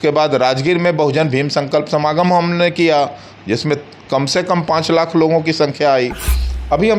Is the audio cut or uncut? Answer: uncut